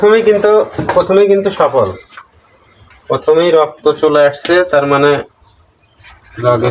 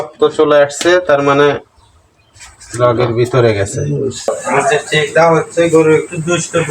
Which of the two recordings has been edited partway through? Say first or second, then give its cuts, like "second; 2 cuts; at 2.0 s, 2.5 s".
second; 1 cut; at 4.3 s